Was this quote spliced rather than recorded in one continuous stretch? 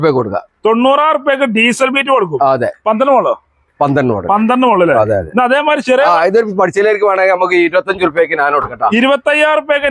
no; 0 cuts

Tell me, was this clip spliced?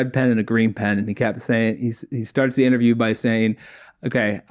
no; 0 cuts

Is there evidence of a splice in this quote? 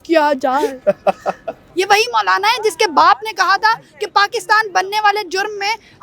yes; 1 cut; at 1.6 s

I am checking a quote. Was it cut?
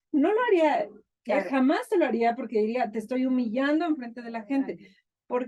no; 0 cuts

